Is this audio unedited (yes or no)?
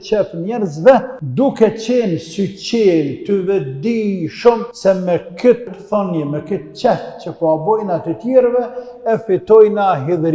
no